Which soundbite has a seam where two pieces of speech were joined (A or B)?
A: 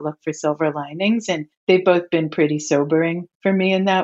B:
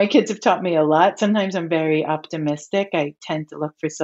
A